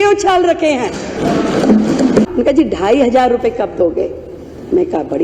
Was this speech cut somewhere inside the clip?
yes; 1 cut; at 2.3 s

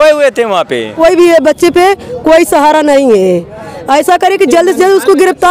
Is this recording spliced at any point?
yes; 1 cut; at 0.9 s

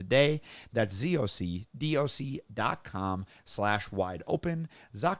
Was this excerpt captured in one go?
yes; 0 cuts

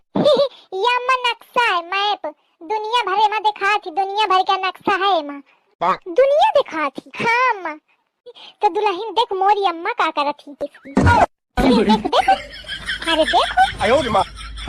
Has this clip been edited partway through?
no; 0 cuts

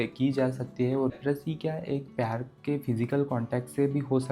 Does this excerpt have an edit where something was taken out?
yes; 1 cut; at 1.1 s

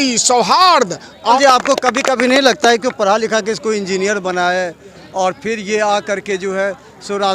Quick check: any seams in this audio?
yes; 1 cut; at 1.4 s

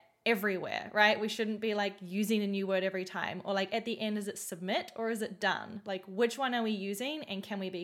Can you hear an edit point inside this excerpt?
no; 0 cuts

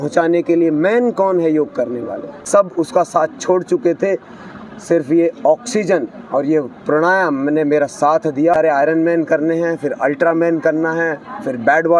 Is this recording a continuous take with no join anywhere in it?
no; 2 cuts; at 2.3 s, 8.5 s

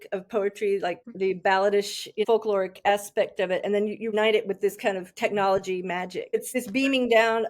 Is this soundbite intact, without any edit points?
no; 4 cuts; at 1.0 s, 2.2 s, 4.1 s, 6.5 s

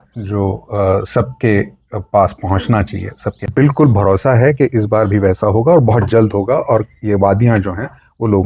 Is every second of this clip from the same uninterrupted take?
no; 1 cut; at 3.5 s

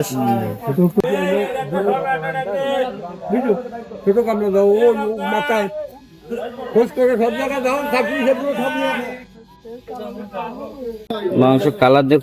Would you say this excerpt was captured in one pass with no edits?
no; 1 cut; at 11.1 s

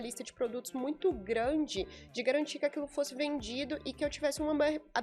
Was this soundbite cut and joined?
no; 0 cuts

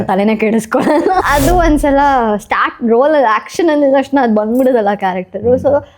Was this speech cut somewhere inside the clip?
yes; 1 cut; at 1.2 s

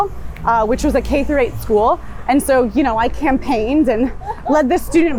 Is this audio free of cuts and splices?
yes; 0 cuts

